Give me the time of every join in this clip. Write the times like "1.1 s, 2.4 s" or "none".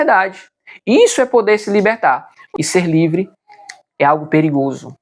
2.4 s